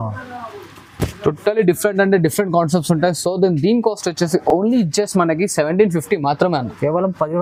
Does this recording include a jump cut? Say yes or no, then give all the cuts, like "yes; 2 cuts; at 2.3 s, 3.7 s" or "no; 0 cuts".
no; 0 cuts